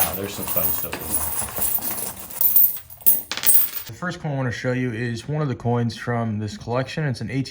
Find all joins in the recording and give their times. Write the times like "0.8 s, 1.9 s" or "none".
2.3 s, 3.9 s

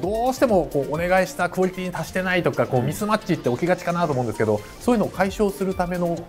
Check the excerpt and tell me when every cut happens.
none

